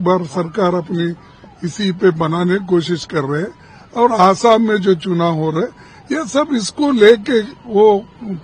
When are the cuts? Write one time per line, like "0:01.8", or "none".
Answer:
none